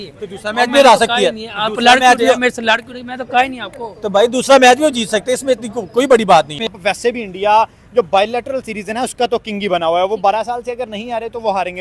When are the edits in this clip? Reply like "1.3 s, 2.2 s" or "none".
6.7 s